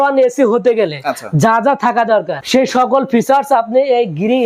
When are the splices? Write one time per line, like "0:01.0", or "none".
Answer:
none